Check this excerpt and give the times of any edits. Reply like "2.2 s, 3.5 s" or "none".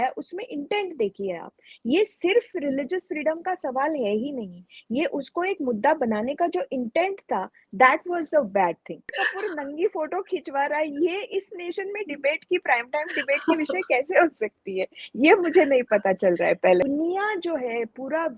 9.1 s, 16.8 s